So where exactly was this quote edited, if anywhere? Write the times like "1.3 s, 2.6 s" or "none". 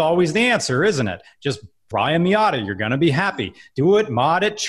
1.8 s